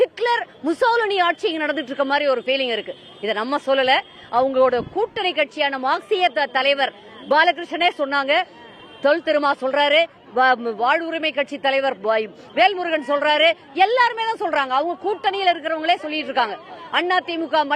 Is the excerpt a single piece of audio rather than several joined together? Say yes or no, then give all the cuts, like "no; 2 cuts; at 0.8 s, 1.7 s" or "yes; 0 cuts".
yes; 0 cuts